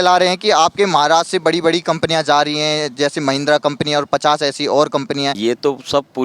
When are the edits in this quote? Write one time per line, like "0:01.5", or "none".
0:05.3